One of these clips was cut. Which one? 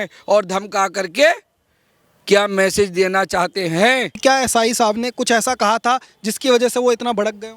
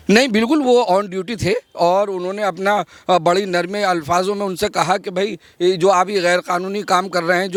first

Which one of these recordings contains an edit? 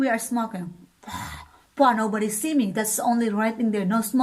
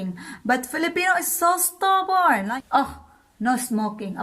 second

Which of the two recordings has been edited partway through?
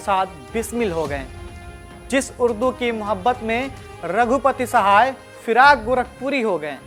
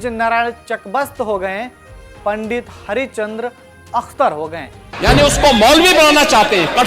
second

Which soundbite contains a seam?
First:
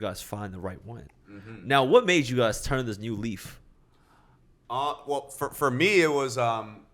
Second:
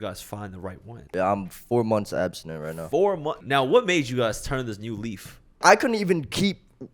second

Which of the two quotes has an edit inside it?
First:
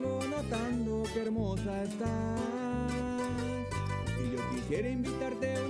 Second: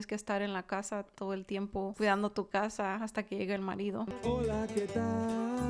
second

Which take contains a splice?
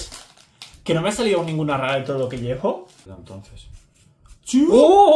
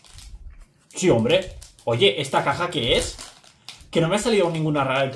first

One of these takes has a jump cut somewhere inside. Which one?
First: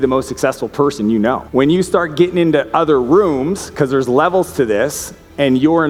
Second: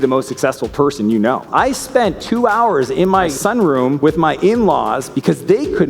second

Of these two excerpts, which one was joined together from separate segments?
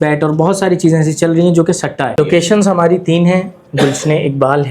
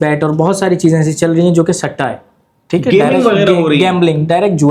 first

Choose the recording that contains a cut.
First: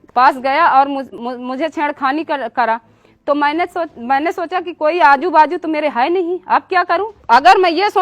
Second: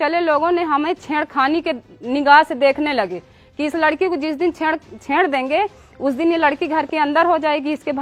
first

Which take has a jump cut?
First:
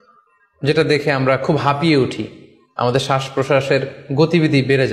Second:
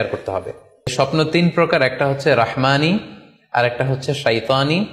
second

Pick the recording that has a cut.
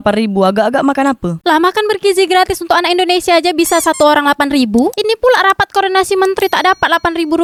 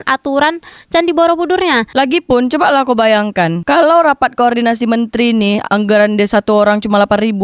second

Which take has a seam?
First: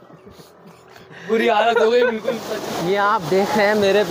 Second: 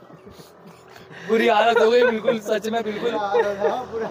first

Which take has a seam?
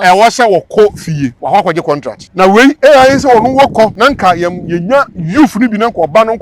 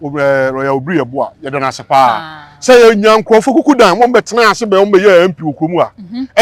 first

